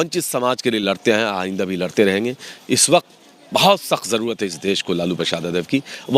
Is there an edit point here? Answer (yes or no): no